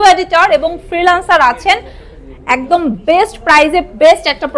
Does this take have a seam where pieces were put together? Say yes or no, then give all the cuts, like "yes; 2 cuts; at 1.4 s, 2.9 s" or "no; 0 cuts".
no; 0 cuts